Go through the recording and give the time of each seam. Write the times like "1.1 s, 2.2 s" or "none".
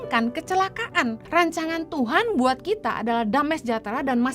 1.2 s